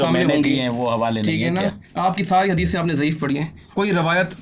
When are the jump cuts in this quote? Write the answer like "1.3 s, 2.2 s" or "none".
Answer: none